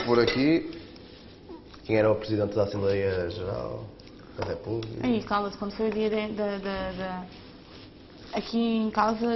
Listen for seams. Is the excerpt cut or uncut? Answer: uncut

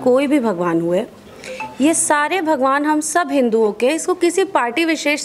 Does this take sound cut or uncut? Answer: uncut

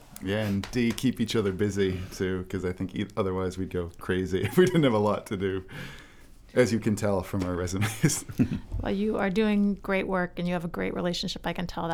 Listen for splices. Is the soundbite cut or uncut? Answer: uncut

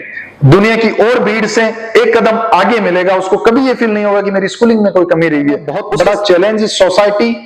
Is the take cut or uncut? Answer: cut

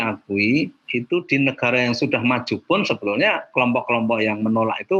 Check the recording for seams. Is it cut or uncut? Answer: uncut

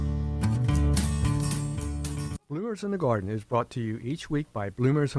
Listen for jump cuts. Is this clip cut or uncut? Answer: cut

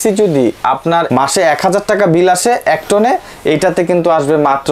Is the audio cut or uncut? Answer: uncut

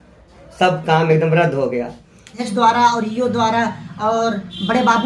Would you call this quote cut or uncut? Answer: cut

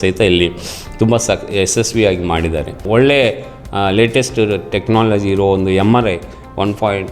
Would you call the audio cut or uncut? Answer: cut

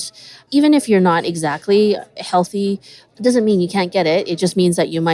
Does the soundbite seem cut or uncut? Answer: uncut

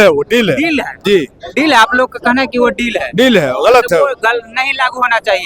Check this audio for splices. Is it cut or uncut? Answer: uncut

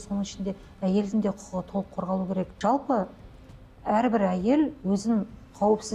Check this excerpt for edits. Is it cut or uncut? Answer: cut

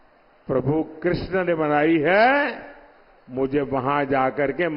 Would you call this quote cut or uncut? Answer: uncut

